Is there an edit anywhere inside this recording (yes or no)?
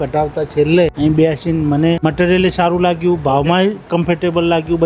yes